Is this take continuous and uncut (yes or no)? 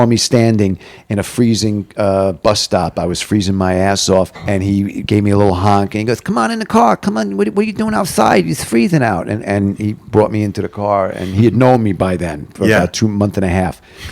no